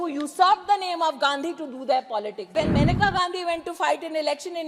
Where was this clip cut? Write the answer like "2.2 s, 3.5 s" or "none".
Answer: 2.5 s